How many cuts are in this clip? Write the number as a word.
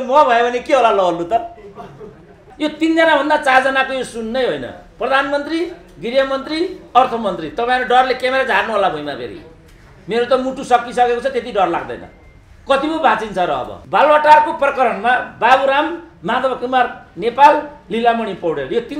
two